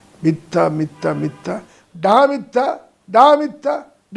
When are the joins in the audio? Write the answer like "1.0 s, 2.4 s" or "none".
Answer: none